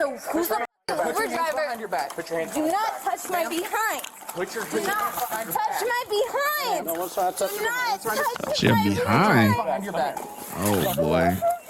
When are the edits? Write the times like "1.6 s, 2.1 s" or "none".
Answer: 10.3 s